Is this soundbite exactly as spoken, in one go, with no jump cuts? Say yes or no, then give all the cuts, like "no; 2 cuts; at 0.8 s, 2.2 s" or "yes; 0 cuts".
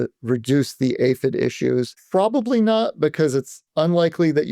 no; 1 cut; at 2.0 s